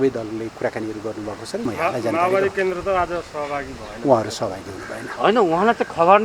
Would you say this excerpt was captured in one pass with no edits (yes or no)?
no